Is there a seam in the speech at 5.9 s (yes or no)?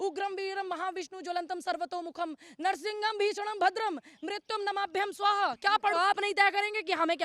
yes